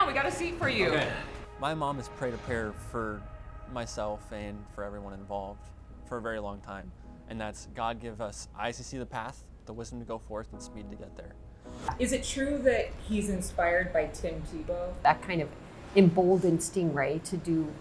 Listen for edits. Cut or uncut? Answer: cut